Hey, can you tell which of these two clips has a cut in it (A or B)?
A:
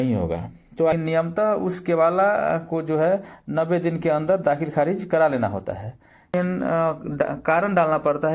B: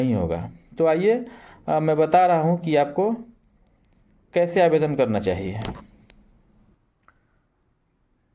A